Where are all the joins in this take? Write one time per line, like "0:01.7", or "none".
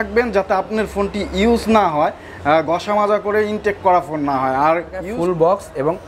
0:05.1